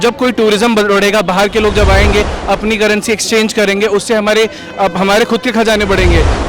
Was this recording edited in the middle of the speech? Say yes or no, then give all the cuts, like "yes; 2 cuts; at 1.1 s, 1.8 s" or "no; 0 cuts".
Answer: no; 0 cuts